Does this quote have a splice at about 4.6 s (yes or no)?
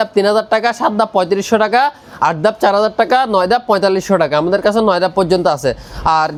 no